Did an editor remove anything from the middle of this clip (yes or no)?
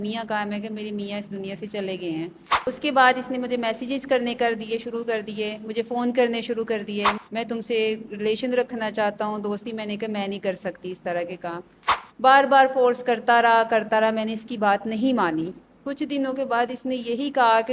yes